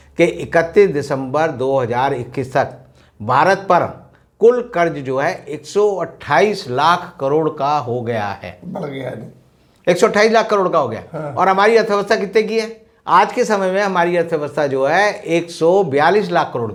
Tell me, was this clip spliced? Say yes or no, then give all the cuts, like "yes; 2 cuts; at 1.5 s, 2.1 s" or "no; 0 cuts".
no; 0 cuts